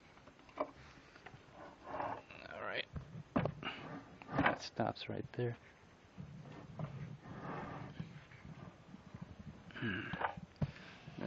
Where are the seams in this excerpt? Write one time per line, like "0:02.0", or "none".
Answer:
0:10.3

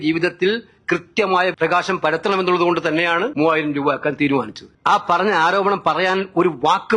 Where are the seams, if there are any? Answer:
0:01.5
0:03.3
0:04.6

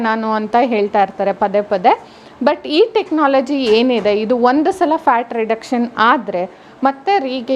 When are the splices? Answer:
none

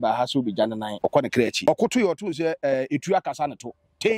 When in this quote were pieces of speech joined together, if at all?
0:01.2

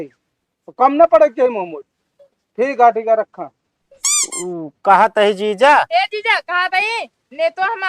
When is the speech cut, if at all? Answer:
none

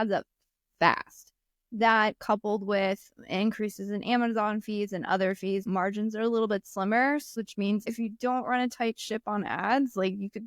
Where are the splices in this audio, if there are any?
0:05.6
0:07.4

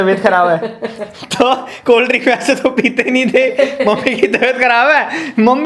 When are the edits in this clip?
none

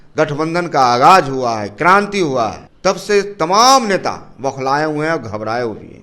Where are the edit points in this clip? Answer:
0:02.7

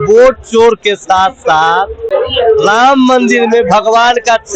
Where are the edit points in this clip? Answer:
0:02.0

